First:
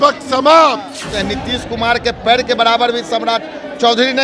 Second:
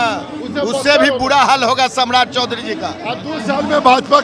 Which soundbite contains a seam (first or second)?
first